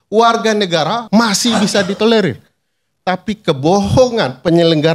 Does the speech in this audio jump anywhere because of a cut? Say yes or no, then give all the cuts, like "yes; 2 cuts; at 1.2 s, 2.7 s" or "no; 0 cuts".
yes; 1 cut; at 1.0 s